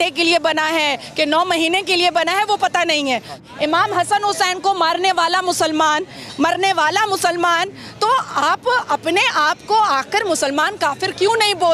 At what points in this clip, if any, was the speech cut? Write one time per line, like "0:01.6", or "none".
0:03.4